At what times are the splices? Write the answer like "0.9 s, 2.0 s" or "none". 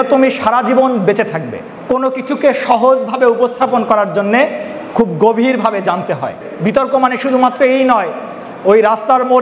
1.6 s, 6.5 s